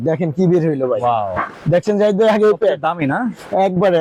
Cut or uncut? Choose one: uncut